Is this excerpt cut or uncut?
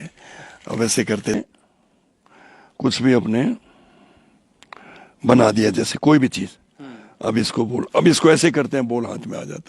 cut